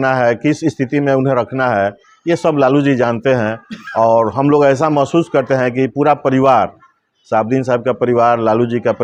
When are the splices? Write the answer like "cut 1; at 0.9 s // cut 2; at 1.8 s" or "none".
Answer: none